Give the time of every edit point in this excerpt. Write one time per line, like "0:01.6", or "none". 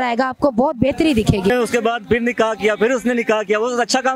0:01.5